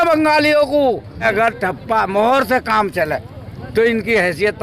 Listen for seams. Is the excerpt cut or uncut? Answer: cut